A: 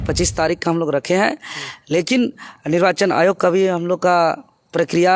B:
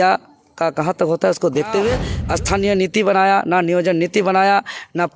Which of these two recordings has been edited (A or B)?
B